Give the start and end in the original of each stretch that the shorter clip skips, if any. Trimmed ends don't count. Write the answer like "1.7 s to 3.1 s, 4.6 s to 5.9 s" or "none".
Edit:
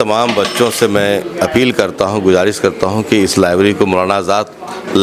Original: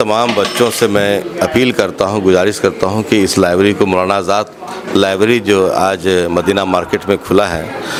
none